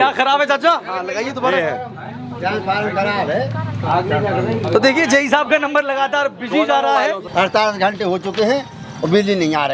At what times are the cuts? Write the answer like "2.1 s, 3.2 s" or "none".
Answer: 7.2 s

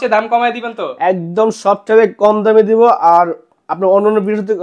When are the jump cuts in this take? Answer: none

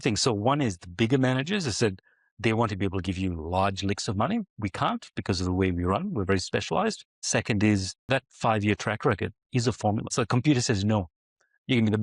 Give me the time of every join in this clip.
7.1 s, 8.1 s, 10.1 s

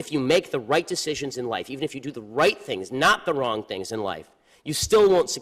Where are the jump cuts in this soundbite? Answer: 2.2 s

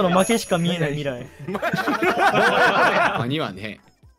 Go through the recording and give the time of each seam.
3.2 s

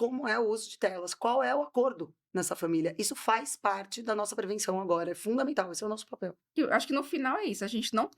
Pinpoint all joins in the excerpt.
6.5 s

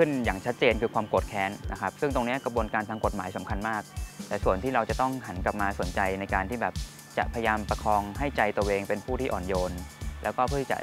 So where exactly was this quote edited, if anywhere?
1.7 s

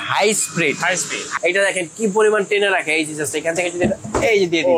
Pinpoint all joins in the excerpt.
1.3 s

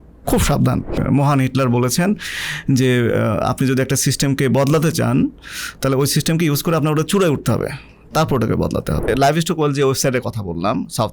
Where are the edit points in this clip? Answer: 1.0 s, 9.1 s

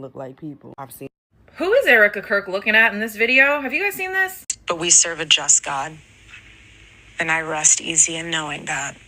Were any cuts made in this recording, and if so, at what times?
1.1 s

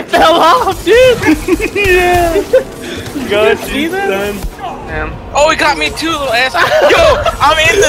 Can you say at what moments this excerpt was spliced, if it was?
none

